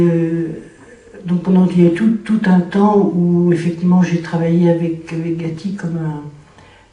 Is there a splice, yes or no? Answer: yes